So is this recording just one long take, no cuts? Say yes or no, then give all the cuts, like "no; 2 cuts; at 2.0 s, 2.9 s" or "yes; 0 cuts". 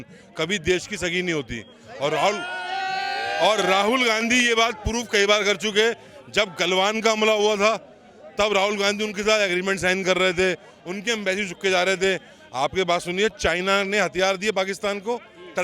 yes; 0 cuts